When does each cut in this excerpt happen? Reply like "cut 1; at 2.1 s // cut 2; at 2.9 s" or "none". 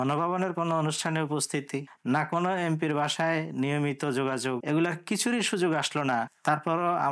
cut 1; at 4.6 s // cut 2; at 6.3 s